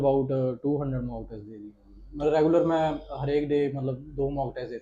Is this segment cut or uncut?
uncut